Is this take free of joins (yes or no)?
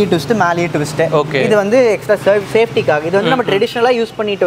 yes